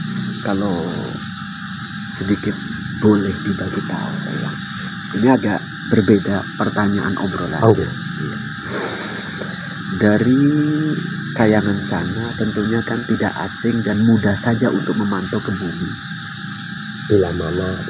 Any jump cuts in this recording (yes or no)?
no